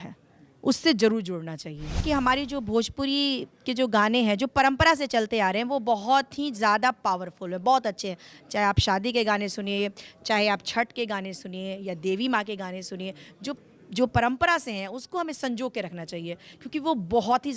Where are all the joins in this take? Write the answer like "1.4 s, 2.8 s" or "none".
2.0 s

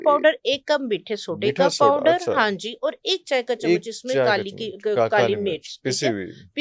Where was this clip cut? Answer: none

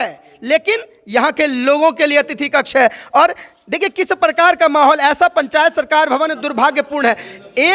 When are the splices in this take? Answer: none

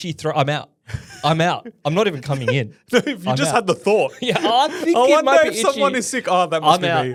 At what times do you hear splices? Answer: none

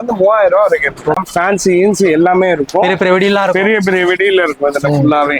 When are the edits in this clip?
1.2 s

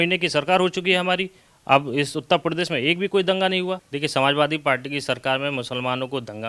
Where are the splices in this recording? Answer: 3.9 s

